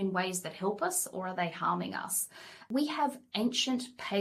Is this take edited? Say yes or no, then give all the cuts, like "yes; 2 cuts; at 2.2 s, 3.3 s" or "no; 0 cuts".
yes; 1 cut; at 2.7 s